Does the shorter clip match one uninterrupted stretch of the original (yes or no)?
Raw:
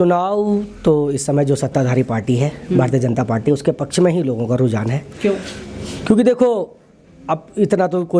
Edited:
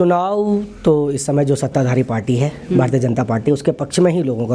yes